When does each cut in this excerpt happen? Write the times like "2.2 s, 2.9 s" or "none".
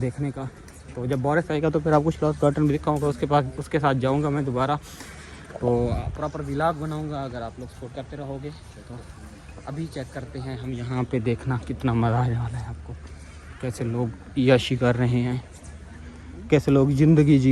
none